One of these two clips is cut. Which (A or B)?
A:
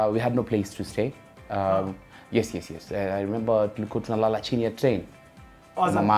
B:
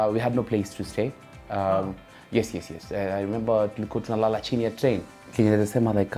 B